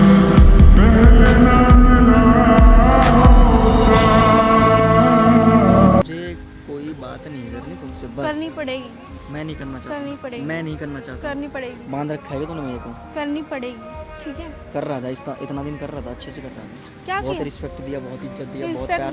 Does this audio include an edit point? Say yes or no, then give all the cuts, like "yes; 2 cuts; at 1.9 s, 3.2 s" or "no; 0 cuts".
yes; 1 cut; at 6.0 s